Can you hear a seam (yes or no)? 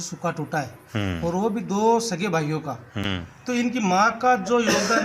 yes